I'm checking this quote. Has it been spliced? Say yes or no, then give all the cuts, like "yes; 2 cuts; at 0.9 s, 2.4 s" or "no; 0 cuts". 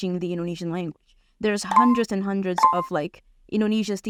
no; 0 cuts